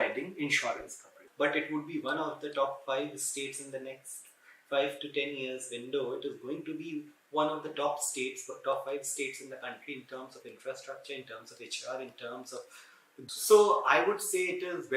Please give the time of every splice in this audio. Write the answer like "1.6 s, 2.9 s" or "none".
1.1 s, 13.2 s